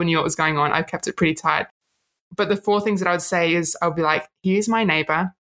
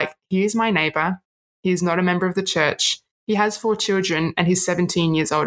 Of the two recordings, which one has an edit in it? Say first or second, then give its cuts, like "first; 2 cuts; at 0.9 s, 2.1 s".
first; 1 cut; at 2.2 s